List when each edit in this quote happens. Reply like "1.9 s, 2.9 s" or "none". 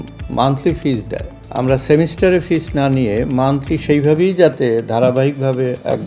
1.4 s